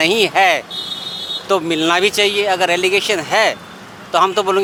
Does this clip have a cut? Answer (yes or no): no